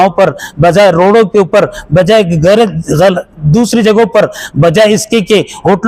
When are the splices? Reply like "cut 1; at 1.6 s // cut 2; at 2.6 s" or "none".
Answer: none